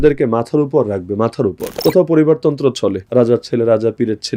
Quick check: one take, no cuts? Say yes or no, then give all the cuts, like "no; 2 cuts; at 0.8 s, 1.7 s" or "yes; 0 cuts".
no; 2 cuts; at 1.7 s, 3.0 s